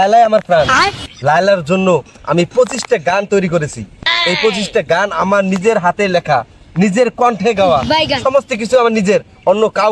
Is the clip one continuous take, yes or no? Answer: yes